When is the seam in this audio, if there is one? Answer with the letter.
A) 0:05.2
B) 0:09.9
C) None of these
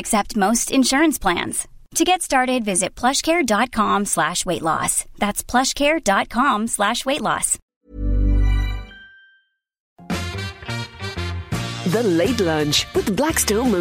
B